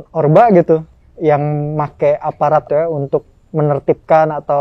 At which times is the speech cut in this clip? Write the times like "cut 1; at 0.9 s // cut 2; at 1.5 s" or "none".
cut 1; at 2.7 s